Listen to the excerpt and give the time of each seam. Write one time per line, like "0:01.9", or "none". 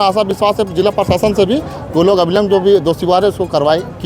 none